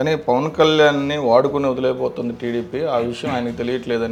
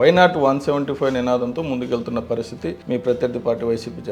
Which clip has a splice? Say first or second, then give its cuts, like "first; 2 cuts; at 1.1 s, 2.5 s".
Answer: second; 1 cut; at 2.8 s